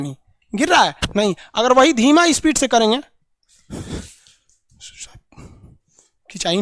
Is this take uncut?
yes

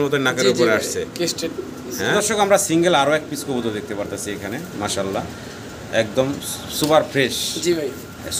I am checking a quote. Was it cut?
yes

